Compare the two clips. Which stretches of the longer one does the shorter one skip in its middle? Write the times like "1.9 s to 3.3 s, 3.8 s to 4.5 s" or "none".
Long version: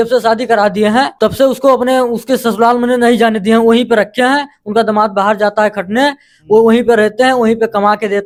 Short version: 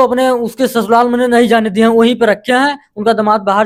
none